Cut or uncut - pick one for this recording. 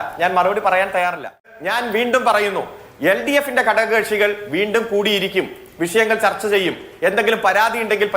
cut